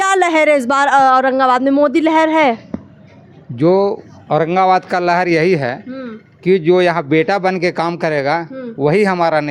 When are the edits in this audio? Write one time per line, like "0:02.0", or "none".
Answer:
none